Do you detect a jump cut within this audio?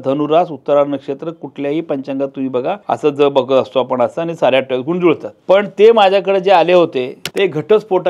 yes; 3 cuts; at 2.8 s, 5.3 s, 7.2 s

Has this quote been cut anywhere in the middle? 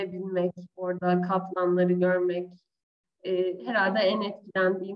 no; 0 cuts

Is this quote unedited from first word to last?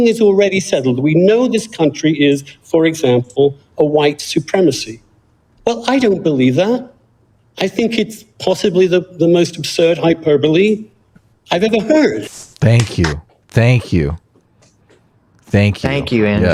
yes; 0 cuts

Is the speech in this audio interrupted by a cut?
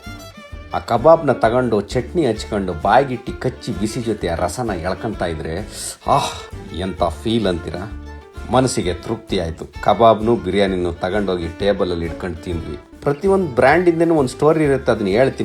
yes; 1 cut; at 12.6 s

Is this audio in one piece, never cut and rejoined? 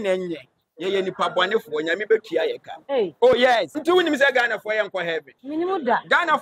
no; 2 cuts; at 3.7 s, 5.3 s

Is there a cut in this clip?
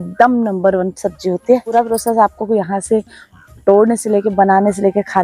yes; 1 cut; at 1.7 s

